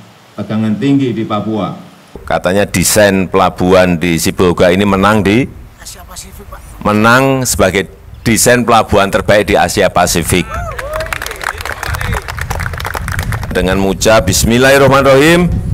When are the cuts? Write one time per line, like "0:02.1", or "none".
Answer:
0:02.2
0:13.5